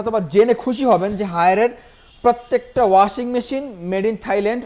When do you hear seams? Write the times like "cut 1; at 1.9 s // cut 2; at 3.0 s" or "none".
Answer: none